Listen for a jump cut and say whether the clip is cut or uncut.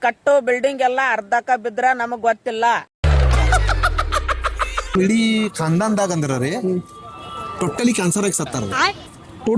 cut